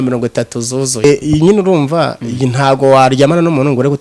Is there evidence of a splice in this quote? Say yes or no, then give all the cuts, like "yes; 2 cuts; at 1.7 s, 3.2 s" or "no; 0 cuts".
yes; 1 cut; at 1.0 s